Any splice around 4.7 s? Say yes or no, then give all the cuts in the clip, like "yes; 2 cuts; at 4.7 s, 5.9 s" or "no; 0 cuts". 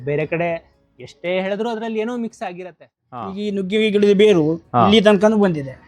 no; 1 cut; at 3.4 s